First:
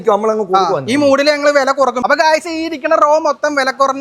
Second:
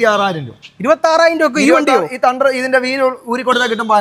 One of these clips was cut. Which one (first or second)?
first